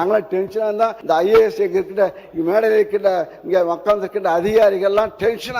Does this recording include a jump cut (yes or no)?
yes